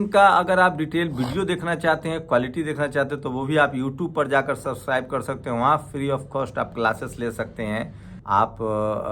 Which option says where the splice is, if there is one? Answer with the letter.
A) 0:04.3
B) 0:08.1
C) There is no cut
B